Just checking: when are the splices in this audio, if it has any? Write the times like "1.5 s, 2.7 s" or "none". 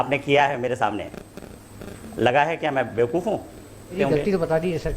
4.0 s